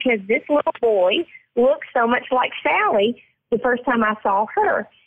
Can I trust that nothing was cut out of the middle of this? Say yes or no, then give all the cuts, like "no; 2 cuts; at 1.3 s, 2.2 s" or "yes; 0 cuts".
yes; 0 cuts